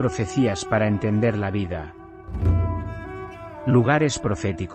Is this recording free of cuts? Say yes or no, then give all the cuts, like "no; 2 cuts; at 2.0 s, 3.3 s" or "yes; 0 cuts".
no; 2 cuts; at 2.3 s, 3.6 s